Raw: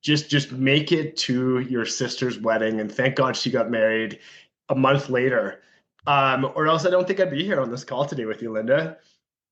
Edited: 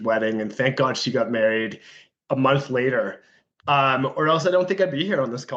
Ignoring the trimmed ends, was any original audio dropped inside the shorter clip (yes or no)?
no